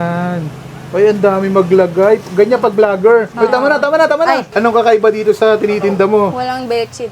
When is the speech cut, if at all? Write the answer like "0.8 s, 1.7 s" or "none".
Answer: 3.3 s, 4.5 s